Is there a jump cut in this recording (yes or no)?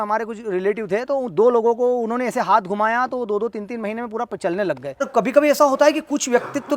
yes